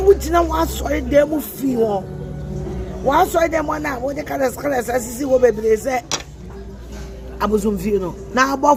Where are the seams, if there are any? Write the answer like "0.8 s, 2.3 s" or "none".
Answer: none